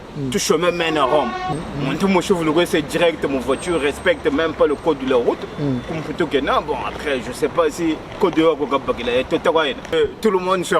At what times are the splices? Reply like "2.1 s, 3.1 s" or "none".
1.5 s, 9.9 s

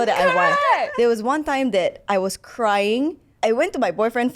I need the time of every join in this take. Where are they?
0.9 s, 3.2 s

